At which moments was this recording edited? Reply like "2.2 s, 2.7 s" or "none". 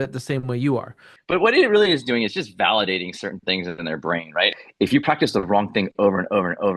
1.1 s, 4.5 s